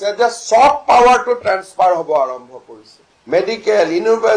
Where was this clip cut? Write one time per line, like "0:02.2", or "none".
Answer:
0:03.1